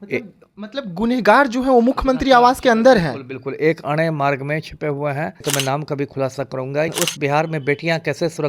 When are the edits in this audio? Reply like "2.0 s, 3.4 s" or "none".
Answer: 5.4 s, 6.9 s